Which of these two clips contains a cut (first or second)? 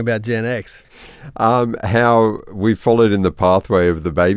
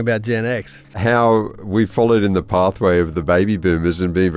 second